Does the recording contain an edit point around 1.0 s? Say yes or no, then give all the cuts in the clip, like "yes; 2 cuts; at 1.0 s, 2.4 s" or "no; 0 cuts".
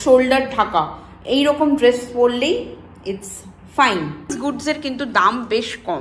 no; 1 cut; at 4.3 s